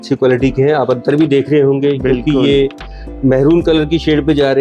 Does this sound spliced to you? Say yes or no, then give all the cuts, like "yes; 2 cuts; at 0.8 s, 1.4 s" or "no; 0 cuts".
no; 0 cuts